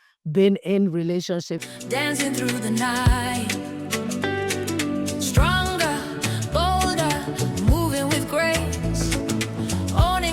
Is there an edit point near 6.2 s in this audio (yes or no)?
no